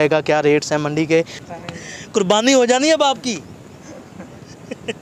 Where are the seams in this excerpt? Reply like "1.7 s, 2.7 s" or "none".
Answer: 1.4 s